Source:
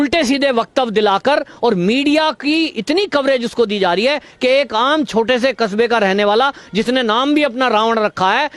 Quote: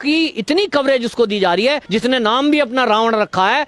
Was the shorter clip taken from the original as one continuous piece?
no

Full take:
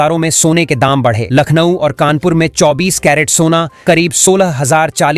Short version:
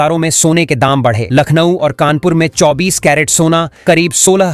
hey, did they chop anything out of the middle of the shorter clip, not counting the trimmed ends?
no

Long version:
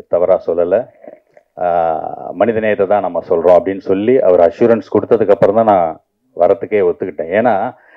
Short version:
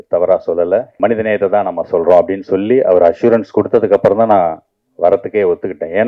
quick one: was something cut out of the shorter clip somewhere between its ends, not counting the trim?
yes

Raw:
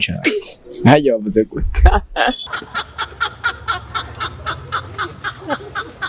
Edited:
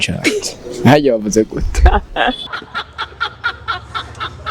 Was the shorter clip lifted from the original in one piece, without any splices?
yes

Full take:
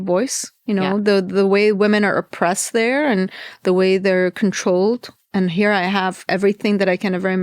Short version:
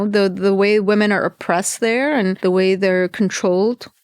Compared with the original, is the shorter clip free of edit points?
no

